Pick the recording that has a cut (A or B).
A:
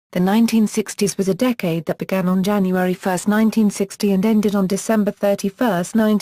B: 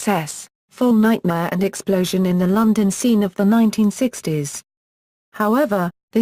A